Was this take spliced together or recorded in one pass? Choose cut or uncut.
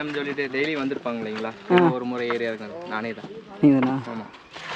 uncut